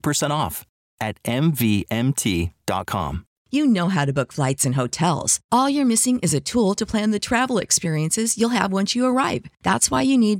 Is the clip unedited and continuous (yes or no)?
no